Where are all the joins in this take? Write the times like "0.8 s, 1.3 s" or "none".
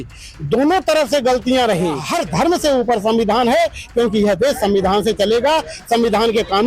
2.1 s

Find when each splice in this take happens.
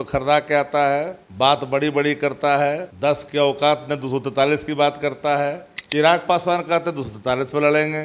1.2 s, 2.9 s, 5.7 s

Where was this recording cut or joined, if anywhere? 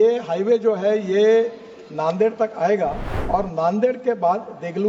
3.1 s

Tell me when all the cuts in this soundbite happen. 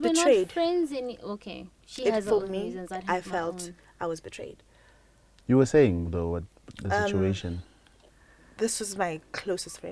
none

